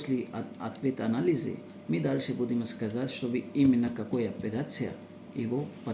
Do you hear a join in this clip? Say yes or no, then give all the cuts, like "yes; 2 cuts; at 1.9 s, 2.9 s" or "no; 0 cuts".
no; 0 cuts